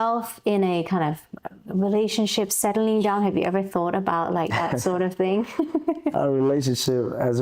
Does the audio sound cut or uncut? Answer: uncut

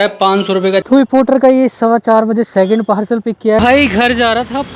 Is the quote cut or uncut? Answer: cut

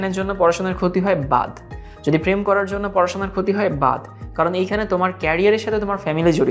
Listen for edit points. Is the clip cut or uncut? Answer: uncut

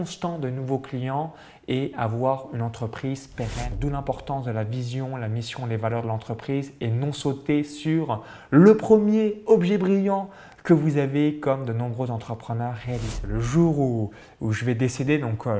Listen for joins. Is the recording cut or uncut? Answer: cut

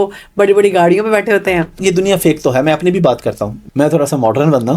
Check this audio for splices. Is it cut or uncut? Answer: cut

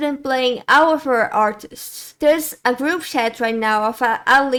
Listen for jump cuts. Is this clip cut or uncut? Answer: uncut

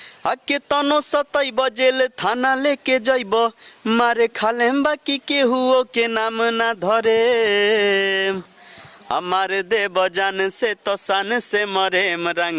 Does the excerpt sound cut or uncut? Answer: uncut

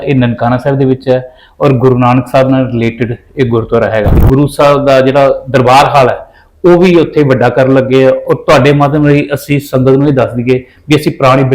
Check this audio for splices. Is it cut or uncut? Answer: cut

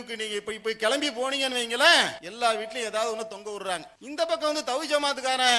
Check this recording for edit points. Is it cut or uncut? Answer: cut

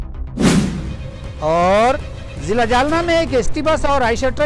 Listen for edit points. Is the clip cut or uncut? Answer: uncut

